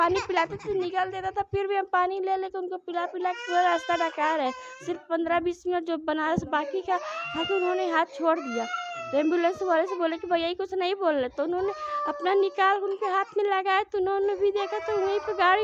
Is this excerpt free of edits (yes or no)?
yes